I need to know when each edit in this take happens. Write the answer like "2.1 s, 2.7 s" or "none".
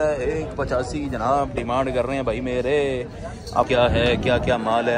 3.7 s